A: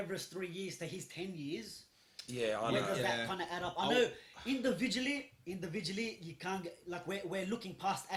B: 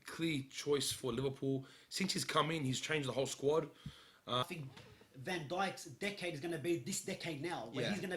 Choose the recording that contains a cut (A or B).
B